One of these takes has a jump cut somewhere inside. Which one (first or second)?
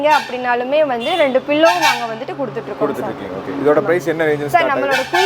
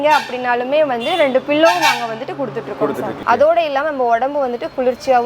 second